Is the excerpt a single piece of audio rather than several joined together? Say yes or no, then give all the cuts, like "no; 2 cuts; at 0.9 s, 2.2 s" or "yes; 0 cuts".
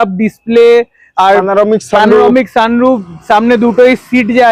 yes; 0 cuts